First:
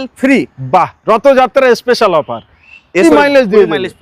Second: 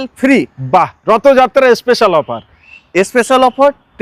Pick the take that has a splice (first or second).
first